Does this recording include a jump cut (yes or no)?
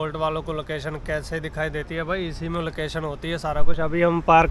no